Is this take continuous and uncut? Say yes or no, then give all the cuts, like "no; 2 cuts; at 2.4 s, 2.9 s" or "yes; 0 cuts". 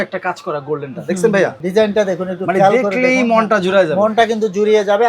no; 1 cut; at 1.6 s